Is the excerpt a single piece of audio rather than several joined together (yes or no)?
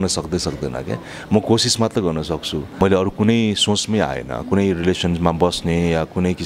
no